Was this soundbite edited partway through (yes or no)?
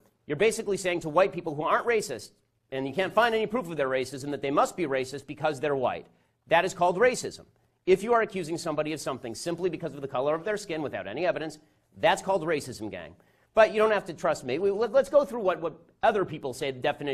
no